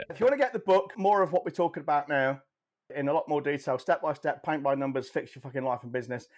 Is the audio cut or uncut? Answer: cut